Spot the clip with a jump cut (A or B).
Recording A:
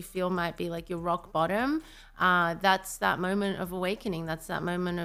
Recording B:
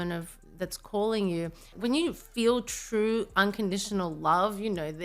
B